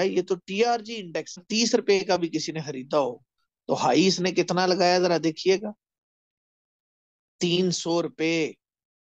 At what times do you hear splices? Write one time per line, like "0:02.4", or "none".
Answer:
0:01.5